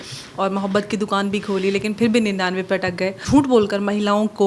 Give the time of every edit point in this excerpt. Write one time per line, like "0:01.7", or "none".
0:03.2